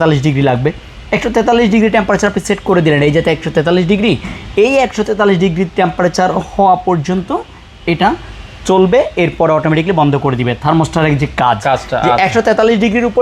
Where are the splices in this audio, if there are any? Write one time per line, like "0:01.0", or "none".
none